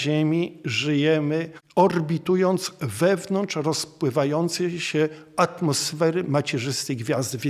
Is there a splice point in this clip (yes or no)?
yes